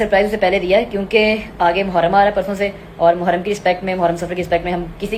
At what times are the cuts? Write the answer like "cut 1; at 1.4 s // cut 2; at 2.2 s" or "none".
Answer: none